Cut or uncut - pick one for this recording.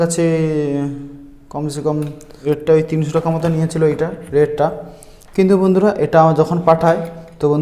cut